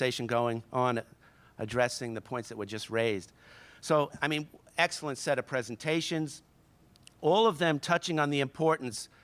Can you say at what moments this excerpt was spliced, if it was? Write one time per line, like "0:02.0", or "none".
0:05.5